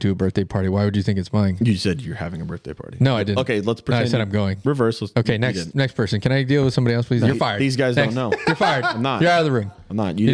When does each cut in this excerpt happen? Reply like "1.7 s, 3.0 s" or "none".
none